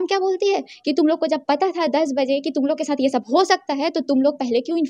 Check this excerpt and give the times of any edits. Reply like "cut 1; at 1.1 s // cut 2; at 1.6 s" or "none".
none